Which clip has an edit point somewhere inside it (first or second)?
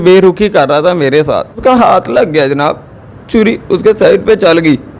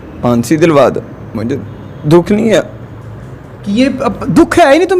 first